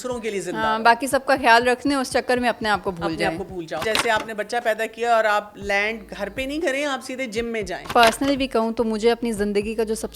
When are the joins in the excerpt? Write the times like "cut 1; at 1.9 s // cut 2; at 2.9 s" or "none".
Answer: cut 1; at 3.8 s // cut 2; at 7.9 s